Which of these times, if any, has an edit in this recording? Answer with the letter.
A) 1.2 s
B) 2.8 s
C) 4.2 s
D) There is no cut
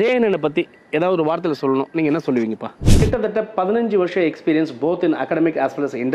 B